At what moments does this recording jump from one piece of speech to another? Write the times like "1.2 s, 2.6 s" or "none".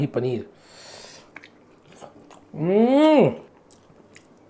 1.3 s, 3.4 s